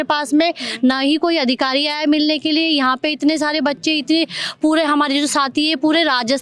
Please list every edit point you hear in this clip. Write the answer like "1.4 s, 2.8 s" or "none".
none